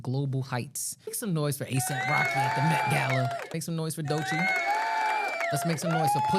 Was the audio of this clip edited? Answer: yes; 2 cuts; at 1.2 s, 3.5 s

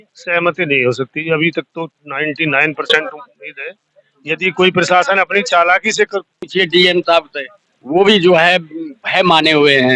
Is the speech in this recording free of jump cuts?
no; 1 cut; at 6.4 s

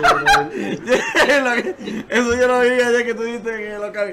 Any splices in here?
no; 0 cuts

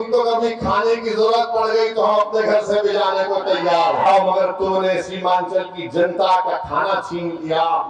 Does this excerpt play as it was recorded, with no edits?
no; 1 cut; at 4.0 s

